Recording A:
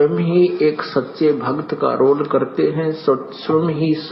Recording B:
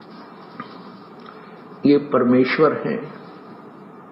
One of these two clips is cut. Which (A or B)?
A